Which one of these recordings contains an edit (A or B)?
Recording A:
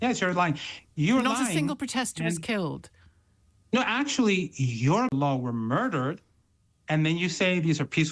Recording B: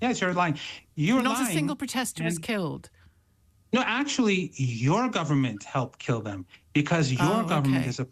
A